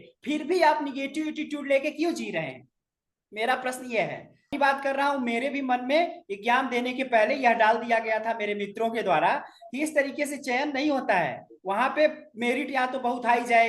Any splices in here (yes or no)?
yes